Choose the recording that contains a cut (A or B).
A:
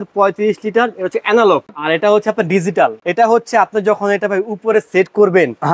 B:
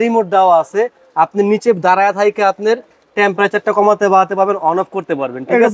A